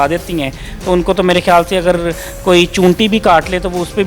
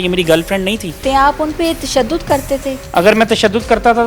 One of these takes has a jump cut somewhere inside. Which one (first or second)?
second